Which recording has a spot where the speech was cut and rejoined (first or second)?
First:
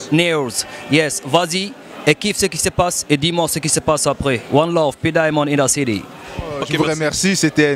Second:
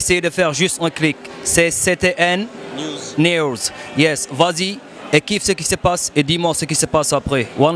first